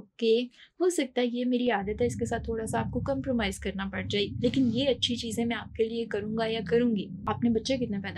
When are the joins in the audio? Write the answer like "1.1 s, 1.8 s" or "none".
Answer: 7.1 s

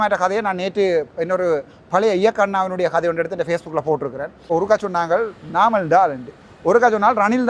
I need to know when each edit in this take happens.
4.5 s

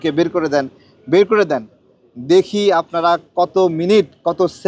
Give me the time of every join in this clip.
none

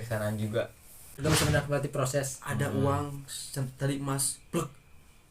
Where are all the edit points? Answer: 1.1 s

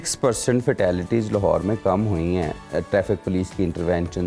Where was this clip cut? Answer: none

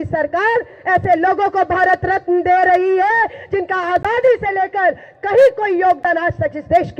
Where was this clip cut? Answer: none

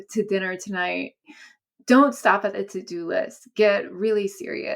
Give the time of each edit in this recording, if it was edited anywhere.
1.2 s

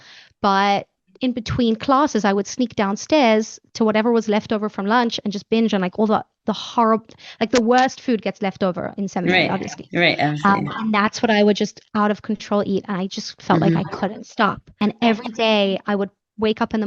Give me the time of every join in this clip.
14.8 s

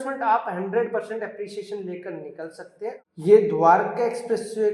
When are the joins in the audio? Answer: 3.1 s

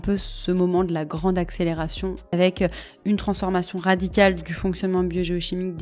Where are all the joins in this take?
2.3 s

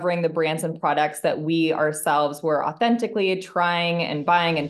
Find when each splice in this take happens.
none

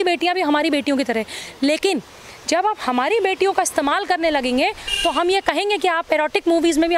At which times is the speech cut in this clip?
none

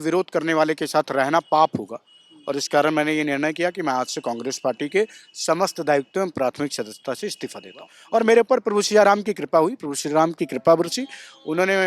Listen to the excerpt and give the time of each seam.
7.9 s

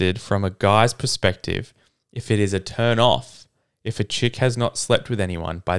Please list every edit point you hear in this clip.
none

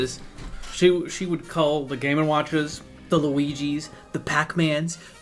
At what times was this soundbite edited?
none

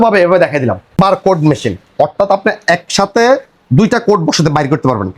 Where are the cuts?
1.0 s

